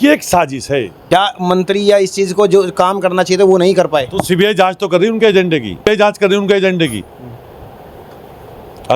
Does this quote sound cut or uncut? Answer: cut